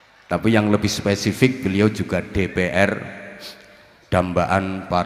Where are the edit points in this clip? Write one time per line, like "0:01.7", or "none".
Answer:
none